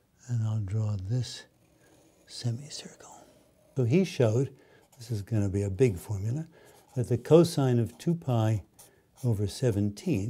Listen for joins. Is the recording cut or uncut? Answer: cut